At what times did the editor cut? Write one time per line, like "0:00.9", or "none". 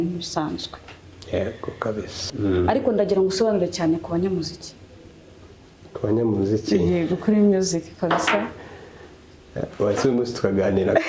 0:02.2